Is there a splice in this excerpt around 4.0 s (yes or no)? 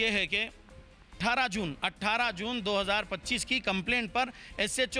no